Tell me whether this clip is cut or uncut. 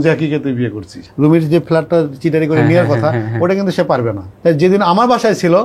cut